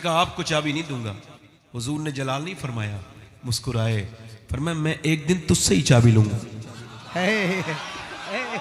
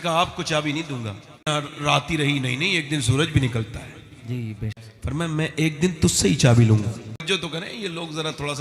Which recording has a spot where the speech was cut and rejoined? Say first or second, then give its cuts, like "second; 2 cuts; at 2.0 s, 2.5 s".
second; 3 cuts; at 1.5 s, 4.9 s, 7.2 s